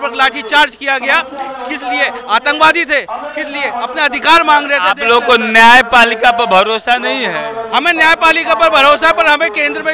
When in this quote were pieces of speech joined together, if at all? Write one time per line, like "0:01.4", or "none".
none